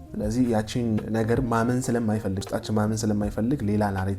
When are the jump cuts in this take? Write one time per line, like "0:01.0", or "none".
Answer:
0:01.0
0:02.4